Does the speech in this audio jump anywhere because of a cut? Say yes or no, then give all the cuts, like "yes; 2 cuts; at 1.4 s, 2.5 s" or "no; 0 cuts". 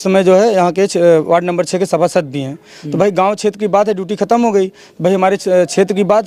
no; 0 cuts